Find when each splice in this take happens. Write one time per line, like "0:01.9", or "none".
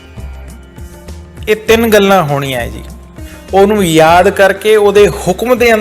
0:01.0